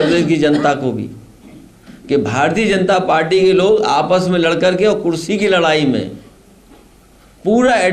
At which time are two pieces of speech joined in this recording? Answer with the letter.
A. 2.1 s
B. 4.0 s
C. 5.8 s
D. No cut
D